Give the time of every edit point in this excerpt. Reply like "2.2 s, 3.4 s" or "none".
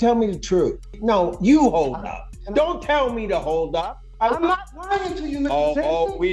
1.0 s, 4.0 s